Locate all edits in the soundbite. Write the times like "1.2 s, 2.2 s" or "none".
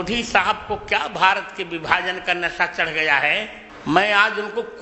3.6 s